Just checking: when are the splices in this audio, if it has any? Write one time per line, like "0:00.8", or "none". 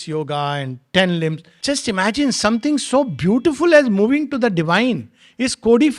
0:01.5

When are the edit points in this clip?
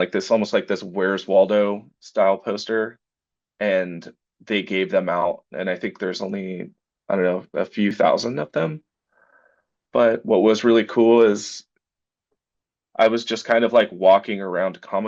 0:08.0

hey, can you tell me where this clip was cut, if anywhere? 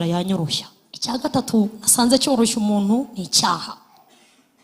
0:01.2

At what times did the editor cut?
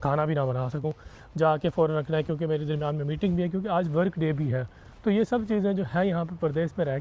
none

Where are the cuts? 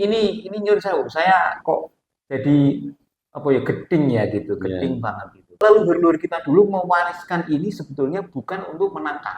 0:05.5

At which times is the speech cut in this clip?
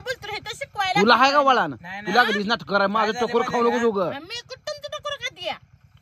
none

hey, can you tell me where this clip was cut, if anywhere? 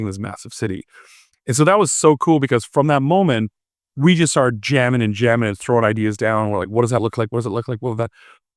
none

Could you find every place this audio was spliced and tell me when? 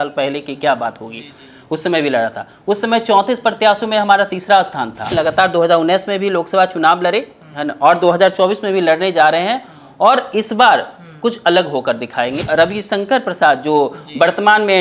0:05.1
0:12.4

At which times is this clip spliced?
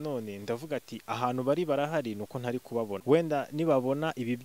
0:03.0

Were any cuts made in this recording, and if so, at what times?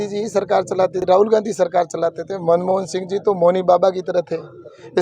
0:01.0

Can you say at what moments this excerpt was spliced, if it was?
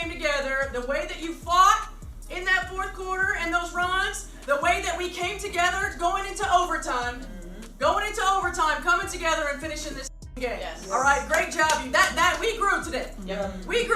0:11.9

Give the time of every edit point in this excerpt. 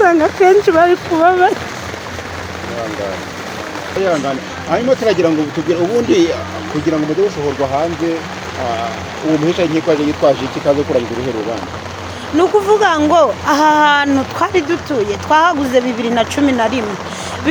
none

